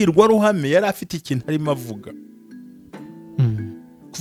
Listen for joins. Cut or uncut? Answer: uncut